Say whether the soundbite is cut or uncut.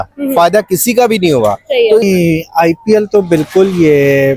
cut